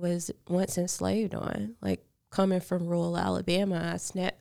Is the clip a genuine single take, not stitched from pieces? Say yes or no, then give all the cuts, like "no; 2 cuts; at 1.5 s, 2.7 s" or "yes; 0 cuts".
yes; 0 cuts